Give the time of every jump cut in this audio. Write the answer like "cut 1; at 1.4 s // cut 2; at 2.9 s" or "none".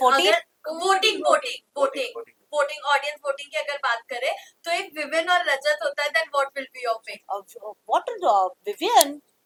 none